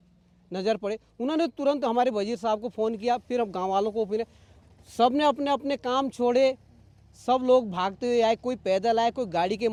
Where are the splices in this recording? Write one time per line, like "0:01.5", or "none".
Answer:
none

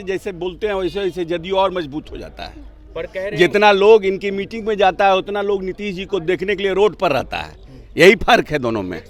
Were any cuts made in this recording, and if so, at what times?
none

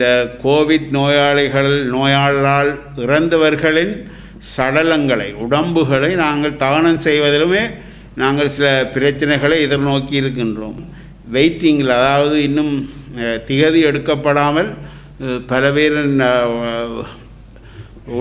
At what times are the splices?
0:10.7

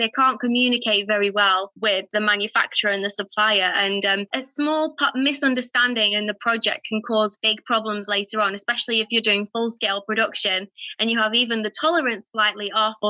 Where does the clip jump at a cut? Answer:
0:02.1
0:04.4
0:07.4

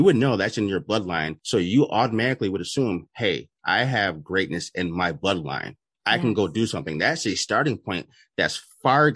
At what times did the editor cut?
0:01.4

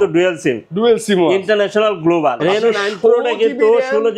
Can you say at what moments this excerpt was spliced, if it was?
0:02.4

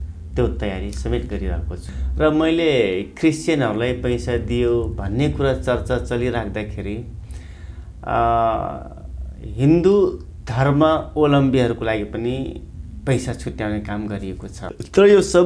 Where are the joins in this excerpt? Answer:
0:01.8
0:14.6

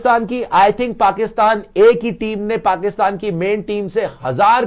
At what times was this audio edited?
none

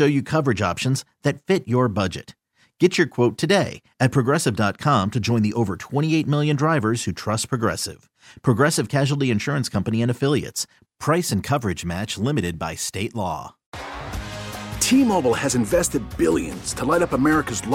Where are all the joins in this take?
0:13.6

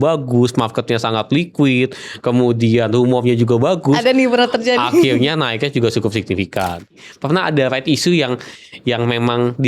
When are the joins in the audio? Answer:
0:07.1

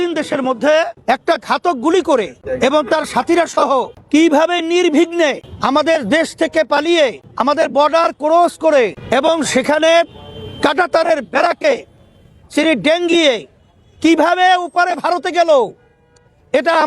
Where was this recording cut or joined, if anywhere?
0:00.9
0:02.4
0:04.0
0:05.5
0:07.3
0:09.0

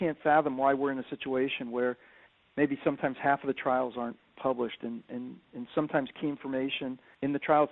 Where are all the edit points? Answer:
none

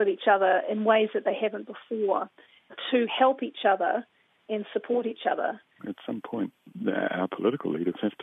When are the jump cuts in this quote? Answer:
0:02.8
0:06.1

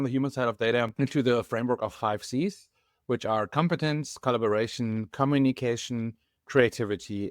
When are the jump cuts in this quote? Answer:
0:00.9

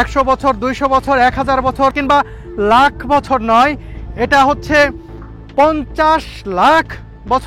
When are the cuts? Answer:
0:01.9

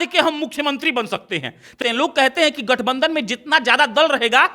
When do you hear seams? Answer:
0:01.8

